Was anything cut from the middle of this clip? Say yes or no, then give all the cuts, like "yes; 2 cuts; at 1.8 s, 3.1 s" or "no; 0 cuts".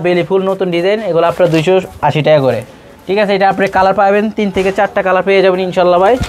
no; 0 cuts